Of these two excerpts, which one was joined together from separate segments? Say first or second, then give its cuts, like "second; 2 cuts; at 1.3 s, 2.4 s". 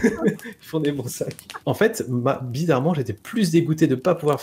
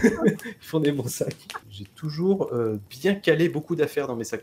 first; 1 cut; at 1.6 s